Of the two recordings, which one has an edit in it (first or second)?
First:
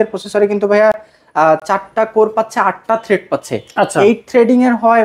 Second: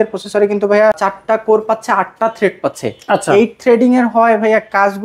second